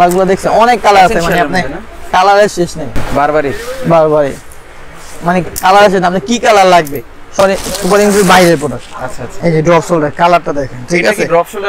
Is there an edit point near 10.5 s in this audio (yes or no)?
no